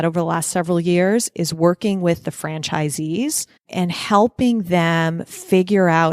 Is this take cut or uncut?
cut